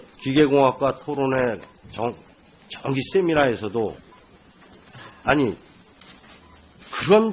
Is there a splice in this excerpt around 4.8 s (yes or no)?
no